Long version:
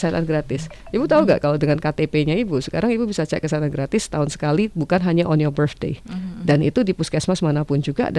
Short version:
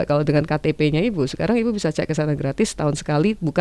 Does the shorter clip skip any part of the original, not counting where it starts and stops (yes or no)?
no